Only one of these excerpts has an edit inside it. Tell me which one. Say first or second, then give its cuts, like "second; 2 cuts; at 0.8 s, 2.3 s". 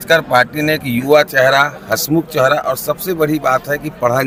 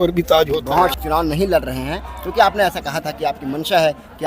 second; 1 cut; at 1.0 s